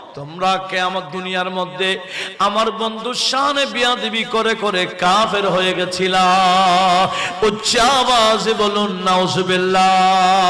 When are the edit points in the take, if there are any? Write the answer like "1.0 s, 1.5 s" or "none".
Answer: none